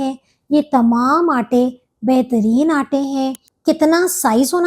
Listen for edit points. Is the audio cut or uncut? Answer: cut